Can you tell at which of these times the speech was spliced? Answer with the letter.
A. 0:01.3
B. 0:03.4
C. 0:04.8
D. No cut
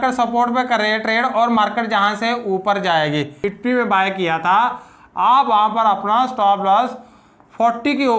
B